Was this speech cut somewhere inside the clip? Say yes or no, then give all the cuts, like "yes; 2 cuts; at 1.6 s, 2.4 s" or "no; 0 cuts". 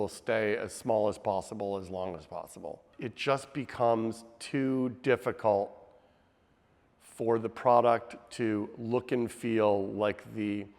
yes; 1 cut; at 2.9 s